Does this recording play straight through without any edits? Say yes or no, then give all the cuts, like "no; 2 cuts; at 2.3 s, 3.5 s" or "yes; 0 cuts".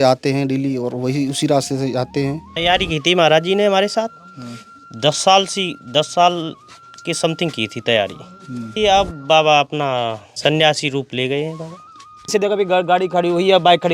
no; 4 cuts; at 2.5 s, 8.7 s, 10.3 s, 12.3 s